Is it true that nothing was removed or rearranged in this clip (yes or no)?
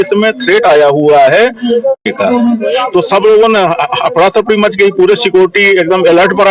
yes